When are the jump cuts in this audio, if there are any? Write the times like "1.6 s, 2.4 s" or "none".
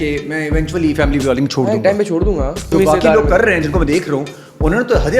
2.7 s